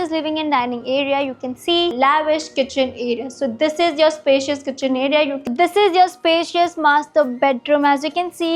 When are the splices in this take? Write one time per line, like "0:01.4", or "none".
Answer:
0:01.9
0:05.5